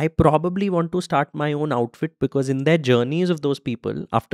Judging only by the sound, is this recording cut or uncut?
uncut